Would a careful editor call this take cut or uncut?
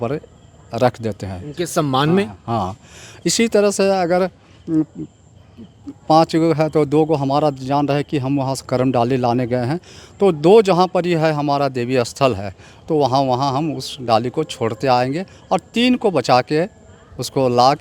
uncut